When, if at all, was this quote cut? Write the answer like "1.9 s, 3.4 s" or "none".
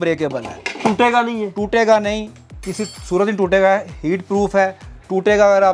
none